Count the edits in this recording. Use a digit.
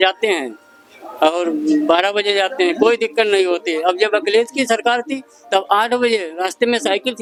0